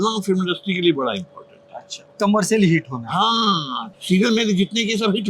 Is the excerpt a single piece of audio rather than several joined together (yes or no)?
no